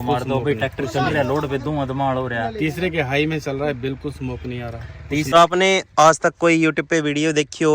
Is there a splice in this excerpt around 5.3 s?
yes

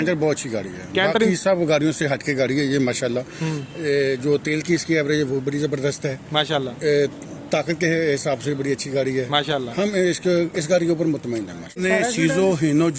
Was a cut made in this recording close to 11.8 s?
yes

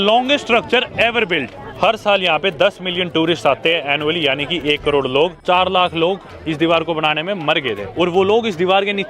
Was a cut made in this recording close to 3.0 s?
no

